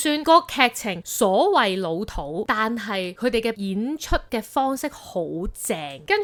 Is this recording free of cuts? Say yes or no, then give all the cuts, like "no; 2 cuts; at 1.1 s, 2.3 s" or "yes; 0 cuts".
yes; 0 cuts